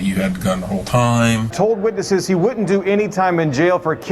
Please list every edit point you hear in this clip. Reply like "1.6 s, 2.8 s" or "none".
1.5 s